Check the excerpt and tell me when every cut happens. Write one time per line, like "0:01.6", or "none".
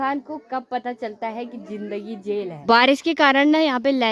0:02.5